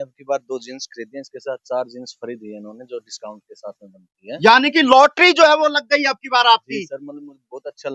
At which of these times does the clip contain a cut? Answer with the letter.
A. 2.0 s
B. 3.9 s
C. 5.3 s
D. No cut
D